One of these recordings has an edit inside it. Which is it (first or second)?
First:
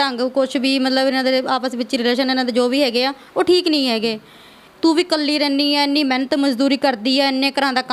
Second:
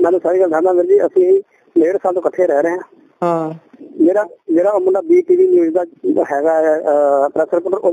first